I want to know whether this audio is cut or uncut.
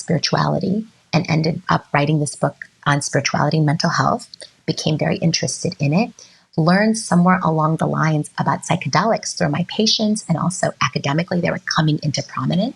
cut